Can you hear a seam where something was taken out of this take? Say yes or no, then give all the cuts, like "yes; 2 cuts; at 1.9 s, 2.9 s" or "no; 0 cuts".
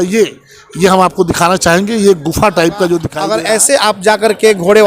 yes; 1 cut; at 3.1 s